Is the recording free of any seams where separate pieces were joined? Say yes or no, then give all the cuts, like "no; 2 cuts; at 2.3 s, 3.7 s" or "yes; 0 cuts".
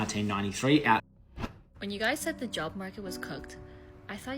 no; 1 cut; at 1.1 s